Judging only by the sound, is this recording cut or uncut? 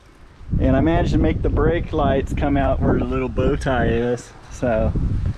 uncut